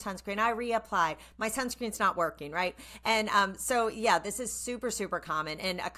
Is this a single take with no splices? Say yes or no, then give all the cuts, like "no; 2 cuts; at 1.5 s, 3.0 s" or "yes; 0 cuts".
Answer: yes; 0 cuts